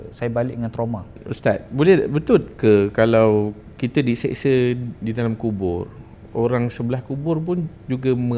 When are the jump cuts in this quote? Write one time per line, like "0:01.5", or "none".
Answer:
0:01.1